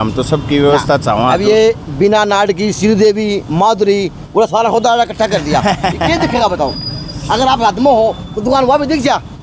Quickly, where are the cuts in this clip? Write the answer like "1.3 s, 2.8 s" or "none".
none